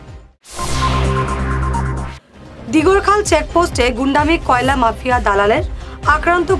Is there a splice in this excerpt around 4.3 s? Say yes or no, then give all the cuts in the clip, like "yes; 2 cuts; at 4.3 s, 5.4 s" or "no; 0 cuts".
no; 1 cut; at 2.0 s